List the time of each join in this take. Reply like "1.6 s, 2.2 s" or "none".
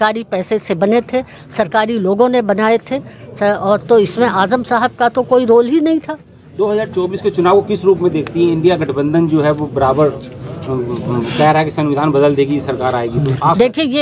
none